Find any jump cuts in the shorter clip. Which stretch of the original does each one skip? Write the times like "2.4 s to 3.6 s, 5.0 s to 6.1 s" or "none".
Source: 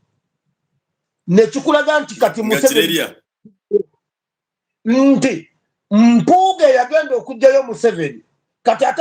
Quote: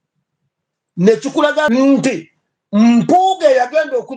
2.0 s to 4.9 s